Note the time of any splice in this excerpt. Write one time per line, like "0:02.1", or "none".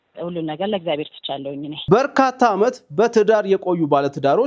0:01.9